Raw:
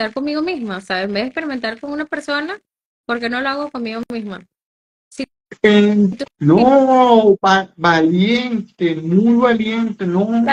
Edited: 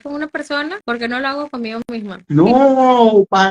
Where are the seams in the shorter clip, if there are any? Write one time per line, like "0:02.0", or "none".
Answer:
0:00.8
0:02.2